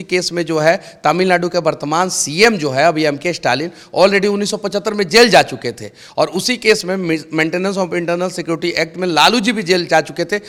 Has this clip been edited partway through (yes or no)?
no